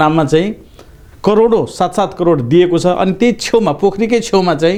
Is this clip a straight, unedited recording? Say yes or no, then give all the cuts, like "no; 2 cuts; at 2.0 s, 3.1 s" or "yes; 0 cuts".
yes; 0 cuts